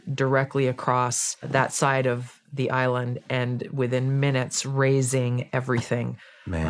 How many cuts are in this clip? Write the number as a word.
one